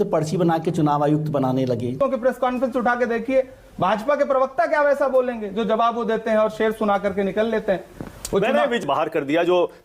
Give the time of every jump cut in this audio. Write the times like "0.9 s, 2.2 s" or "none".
1.9 s, 8.8 s